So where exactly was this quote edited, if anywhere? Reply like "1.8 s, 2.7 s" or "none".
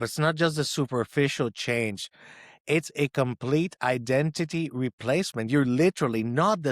none